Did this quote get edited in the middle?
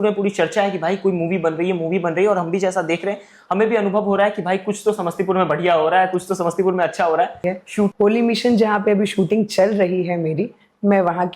yes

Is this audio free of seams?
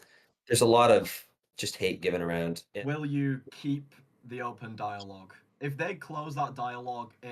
no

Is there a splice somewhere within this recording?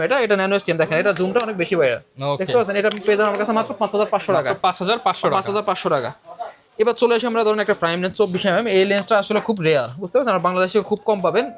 no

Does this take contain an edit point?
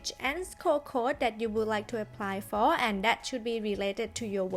no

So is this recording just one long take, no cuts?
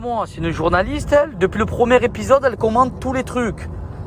no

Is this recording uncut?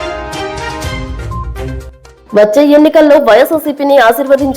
no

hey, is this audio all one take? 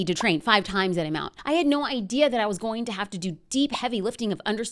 no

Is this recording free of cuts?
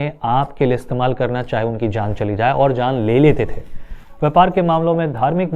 yes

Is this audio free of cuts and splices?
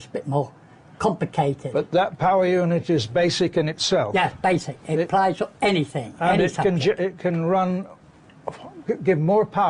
no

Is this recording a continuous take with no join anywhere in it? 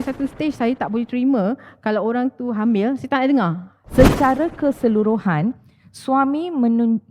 no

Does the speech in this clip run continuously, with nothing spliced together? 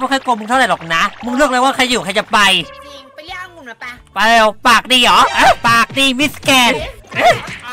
yes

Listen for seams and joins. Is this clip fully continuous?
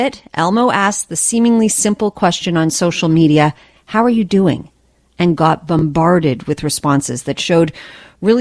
yes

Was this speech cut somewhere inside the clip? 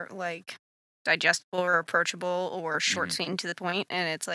no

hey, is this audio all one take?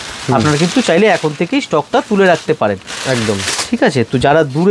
yes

